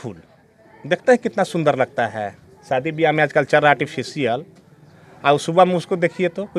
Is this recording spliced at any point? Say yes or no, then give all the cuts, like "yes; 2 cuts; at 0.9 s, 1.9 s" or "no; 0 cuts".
no; 0 cuts